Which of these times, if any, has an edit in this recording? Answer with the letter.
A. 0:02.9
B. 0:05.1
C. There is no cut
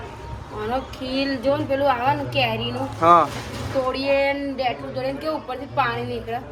C